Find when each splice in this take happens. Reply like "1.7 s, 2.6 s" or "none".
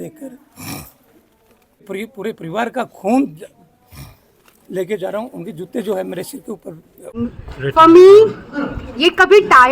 1.9 s, 7.0 s